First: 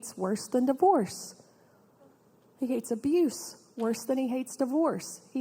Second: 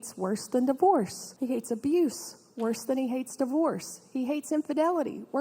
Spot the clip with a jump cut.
second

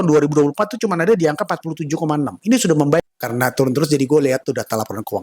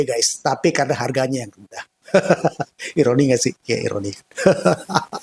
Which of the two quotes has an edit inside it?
first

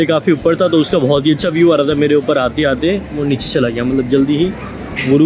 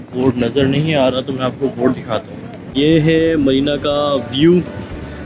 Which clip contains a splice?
second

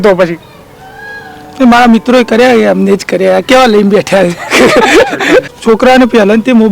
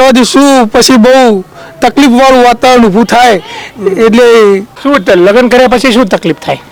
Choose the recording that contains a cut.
first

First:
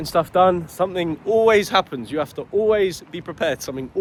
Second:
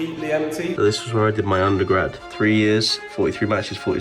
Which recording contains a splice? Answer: second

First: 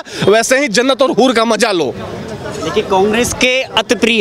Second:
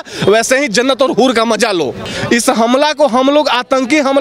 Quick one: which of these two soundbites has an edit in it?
second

